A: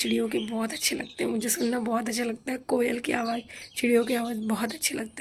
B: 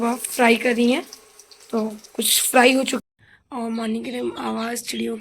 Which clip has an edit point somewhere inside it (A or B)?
B